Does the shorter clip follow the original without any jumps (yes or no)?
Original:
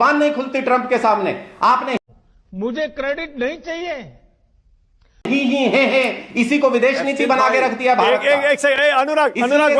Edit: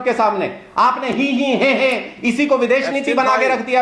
no